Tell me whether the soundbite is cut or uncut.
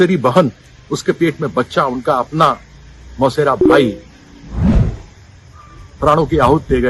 uncut